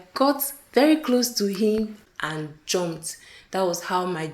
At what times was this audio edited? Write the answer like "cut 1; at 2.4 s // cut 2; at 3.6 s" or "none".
cut 1; at 2.0 s

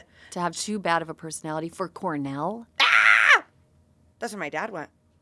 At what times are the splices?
none

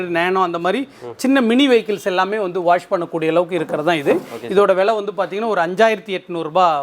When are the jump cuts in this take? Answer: none

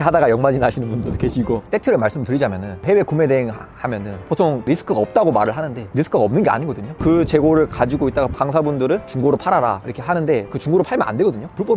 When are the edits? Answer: cut 1; at 1.6 s // cut 2; at 7.0 s // cut 3; at 8.4 s // cut 4; at 10.5 s

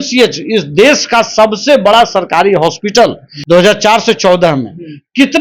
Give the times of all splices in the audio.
cut 1; at 3.3 s

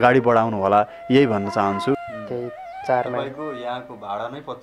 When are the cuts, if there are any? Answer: cut 1; at 2.1 s

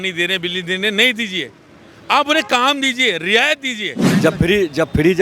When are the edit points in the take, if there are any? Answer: cut 1; at 4.0 s

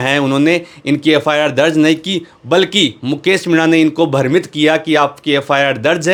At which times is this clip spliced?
none

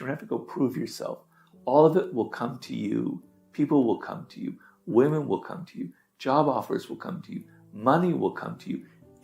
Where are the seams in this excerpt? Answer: none

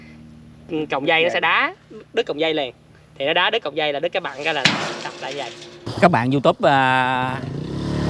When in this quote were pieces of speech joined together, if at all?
cut 1; at 5.9 s

